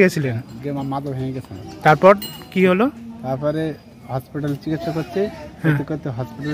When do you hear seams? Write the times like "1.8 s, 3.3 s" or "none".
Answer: none